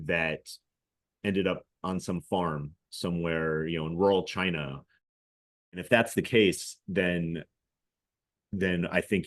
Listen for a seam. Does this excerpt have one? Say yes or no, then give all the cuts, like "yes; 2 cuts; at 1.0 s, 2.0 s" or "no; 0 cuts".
yes; 1 cut; at 5.1 s